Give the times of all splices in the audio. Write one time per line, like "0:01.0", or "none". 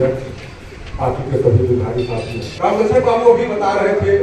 0:02.4